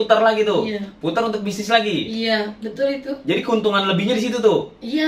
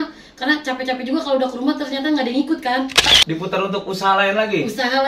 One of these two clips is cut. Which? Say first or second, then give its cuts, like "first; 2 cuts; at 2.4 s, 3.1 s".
second; 1 cut; at 3.1 s